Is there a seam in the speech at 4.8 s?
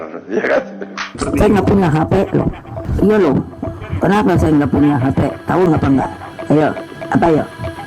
no; 1 cut; at 1.1 s

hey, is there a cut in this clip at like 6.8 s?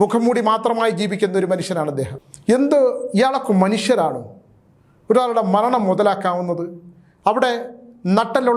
no; 1 cut; at 2.2 s

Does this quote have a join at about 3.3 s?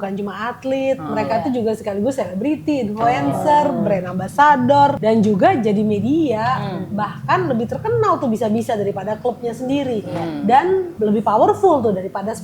no; 2 cuts; at 5.0 s, 10.9 s

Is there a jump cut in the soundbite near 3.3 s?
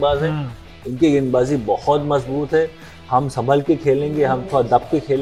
no; 0 cuts

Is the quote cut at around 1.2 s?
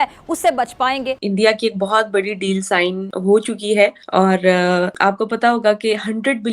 yes; 4 cuts; at 1.2 s, 3.1 s, 4.0 s, 4.9 s

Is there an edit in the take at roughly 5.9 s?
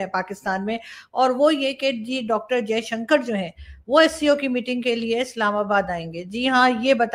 no; 0 cuts

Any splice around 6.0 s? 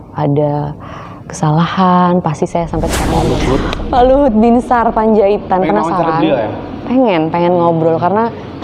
no; 1 cut; at 3.2 s

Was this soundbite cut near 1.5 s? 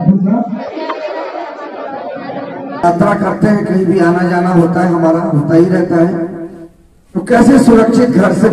no; 1 cut; at 2.8 s

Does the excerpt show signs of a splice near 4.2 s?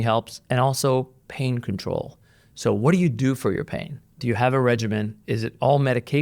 yes; 1 cut; at 4.2 s

